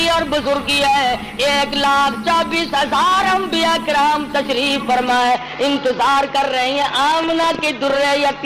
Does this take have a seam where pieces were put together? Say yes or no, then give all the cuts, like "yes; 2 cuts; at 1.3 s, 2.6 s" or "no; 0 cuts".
no; 0 cuts